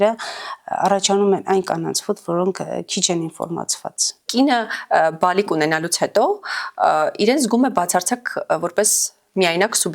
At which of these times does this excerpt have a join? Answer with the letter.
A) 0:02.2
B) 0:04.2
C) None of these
B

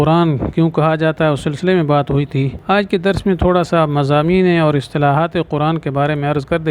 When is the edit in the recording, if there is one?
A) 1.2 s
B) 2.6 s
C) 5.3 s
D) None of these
B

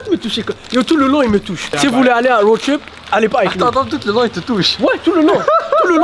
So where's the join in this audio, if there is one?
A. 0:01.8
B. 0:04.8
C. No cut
A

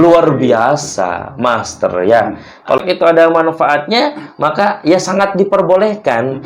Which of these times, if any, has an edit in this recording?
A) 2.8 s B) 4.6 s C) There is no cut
A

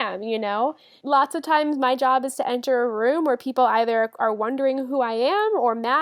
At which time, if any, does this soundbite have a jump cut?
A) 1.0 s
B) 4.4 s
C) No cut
A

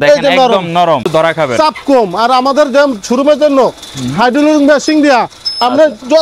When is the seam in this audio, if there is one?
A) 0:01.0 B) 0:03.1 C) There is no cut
A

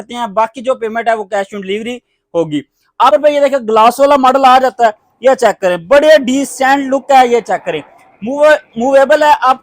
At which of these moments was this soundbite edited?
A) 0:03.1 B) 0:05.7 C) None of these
A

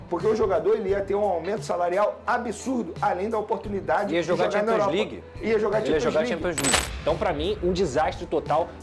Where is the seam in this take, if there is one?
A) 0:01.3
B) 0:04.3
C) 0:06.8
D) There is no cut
C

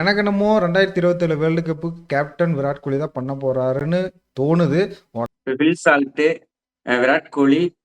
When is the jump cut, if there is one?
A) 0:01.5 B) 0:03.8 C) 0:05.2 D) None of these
C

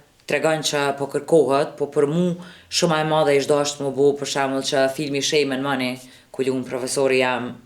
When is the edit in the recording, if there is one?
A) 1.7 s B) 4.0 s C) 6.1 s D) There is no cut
D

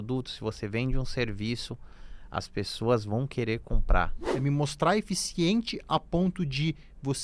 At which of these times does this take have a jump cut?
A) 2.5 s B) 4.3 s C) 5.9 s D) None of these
B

